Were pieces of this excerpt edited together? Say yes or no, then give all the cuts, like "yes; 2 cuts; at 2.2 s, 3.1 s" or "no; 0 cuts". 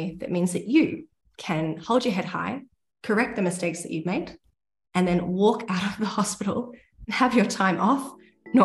no; 0 cuts